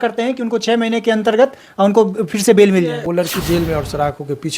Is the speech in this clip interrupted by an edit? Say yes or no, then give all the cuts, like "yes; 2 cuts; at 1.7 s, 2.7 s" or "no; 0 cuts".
yes; 1 cut; at 3.0 s